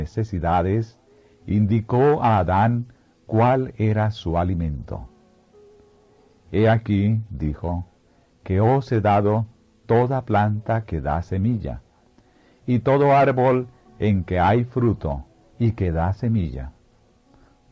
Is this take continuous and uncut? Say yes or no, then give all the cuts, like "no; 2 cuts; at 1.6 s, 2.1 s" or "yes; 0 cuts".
no; 1 cut; at 5.4 s